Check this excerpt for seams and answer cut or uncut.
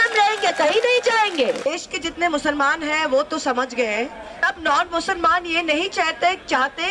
cut